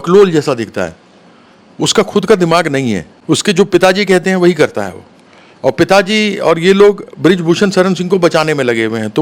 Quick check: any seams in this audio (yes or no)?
yes